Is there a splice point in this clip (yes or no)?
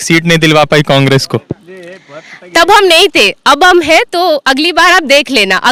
no